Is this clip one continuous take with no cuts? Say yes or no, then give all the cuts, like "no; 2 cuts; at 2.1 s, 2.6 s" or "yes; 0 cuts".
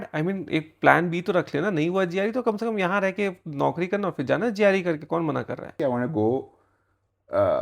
no; 1 cut; at 5.7 s